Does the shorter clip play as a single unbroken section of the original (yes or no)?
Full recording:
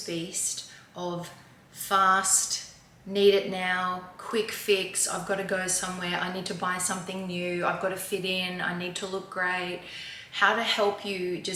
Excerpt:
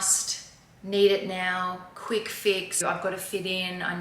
no